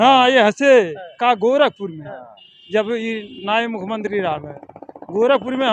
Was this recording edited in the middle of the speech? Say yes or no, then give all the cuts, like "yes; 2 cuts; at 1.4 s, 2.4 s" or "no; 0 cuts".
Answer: no; 0 cuts